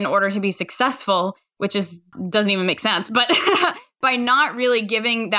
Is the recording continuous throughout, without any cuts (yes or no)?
no